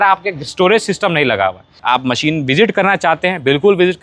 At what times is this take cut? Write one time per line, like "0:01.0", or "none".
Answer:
0:01.8